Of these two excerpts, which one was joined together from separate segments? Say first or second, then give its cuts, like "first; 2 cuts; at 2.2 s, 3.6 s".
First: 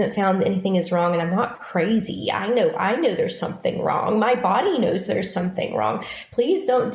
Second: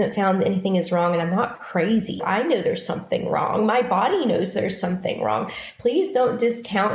second; 1 cut; at 2.2 s